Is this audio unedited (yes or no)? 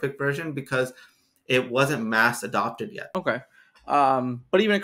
no